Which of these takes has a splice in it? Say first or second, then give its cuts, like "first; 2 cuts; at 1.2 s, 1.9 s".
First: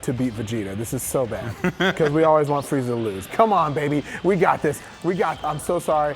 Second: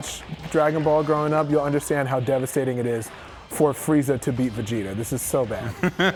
first; 1 cut; at 3.3 s